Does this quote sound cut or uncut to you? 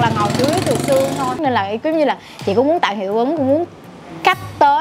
cut